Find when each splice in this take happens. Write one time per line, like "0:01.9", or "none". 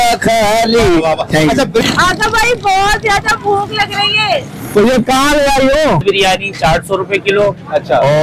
0:01.8
0:06.0